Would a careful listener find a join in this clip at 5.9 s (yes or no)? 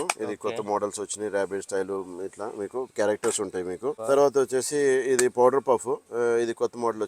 no